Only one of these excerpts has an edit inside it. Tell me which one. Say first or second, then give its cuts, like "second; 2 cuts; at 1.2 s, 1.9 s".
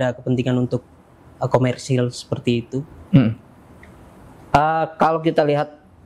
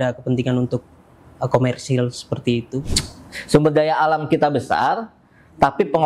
second; 1 cut; at 3.0 s